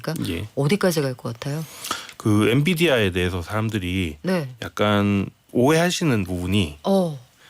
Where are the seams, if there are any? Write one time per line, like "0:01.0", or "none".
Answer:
0:05.4

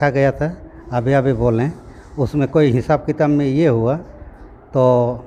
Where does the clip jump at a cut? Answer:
none

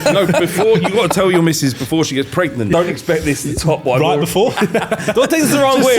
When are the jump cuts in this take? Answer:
0:02.7
0:04.6

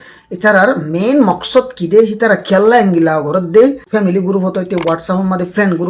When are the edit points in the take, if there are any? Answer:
0:03.8

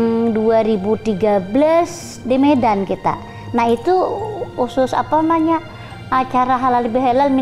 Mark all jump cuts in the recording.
none

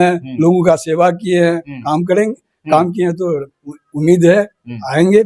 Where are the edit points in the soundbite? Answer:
none

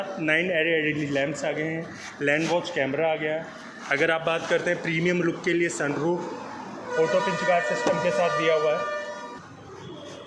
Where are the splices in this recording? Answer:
0:09.0

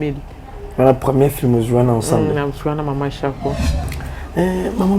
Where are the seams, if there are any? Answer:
0:03.9

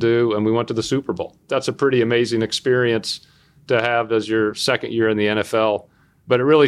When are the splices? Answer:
0:01.4

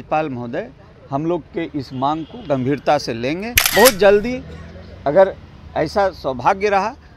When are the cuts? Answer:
0:03.6

